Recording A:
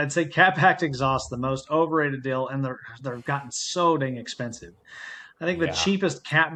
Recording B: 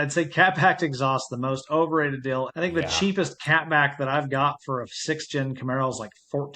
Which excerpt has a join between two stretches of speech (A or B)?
B